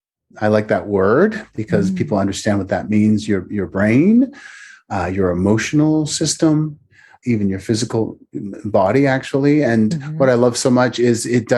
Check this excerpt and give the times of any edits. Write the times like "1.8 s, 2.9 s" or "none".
7.2 s

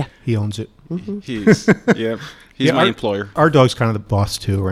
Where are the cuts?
none

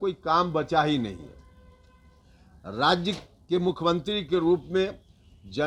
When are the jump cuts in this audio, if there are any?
none

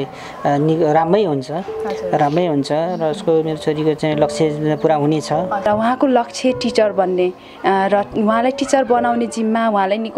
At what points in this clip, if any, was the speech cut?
5.7 s

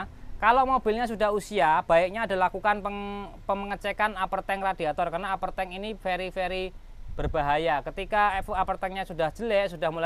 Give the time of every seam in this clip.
none

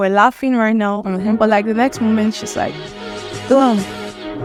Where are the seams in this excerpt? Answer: none

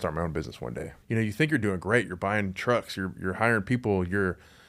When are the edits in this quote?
0.9 s

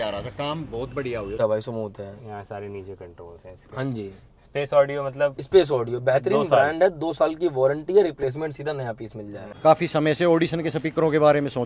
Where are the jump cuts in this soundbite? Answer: 1.3 s, 9.5 s

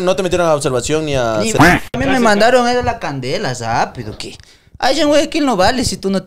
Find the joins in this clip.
none

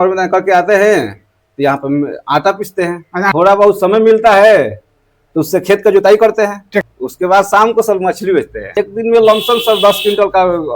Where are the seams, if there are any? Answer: 3.3 s, 6.8 s, 8.8 s

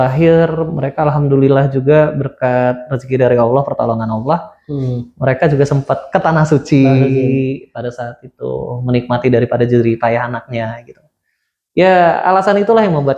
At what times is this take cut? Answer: none

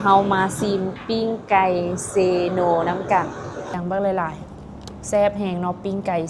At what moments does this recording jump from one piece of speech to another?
3.8 s

